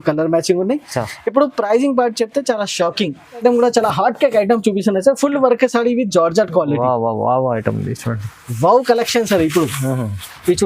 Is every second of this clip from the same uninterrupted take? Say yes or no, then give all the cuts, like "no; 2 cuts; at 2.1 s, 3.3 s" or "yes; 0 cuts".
no; 1 cut; at 3.4 s